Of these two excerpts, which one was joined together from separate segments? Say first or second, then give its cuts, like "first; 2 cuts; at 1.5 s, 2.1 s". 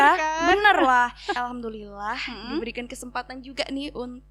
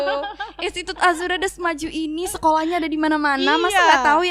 first; 1 cut; at 1.3 s